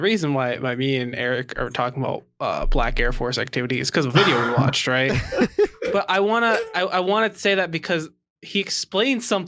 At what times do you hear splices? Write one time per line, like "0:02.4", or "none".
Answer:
none